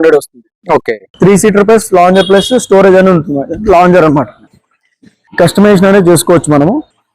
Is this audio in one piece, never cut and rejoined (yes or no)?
no